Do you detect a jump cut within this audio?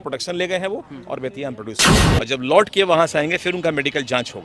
yes; 1 cut; at 2.0 s

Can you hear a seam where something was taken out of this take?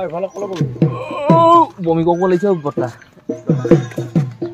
no; 0 cuts

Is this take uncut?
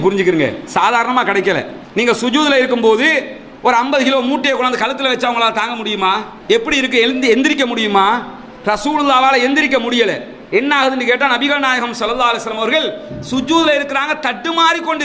no; 1 cut; at 1.8 s

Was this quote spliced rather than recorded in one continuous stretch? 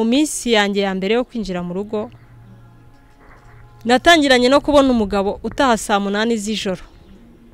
no; 0 cuts

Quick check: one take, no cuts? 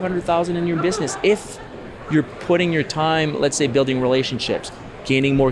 yes; 0 cuts

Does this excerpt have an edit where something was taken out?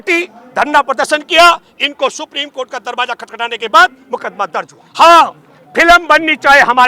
yes; 1 cut; at 4.8 s

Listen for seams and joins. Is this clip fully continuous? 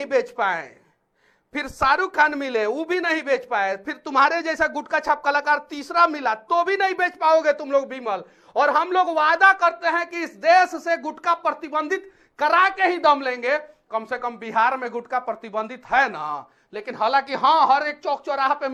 yes; 0 cuts

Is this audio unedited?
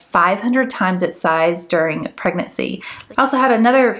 no; 1 cut; at 2.9 s

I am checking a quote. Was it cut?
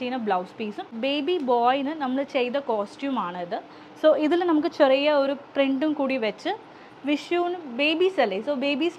yes; 1 cut; at 0.9 s

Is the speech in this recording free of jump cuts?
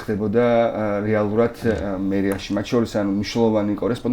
yes; 0 cuts

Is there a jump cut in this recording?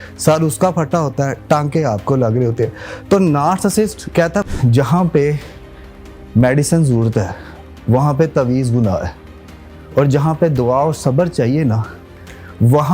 yes; 1 cut; at 4.4 s

